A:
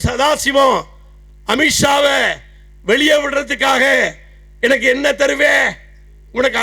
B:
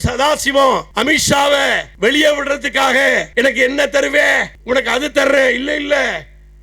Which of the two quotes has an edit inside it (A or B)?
B